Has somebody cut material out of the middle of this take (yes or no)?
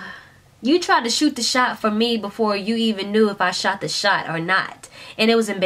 no